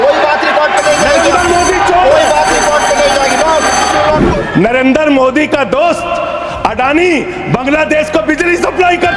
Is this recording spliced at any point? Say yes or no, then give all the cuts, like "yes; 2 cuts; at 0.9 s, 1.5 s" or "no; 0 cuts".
no; 0 cuts